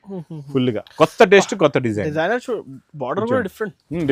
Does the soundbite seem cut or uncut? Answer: uncut